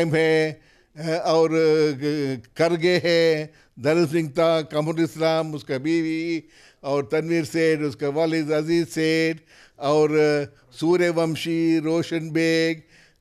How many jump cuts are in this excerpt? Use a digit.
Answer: 0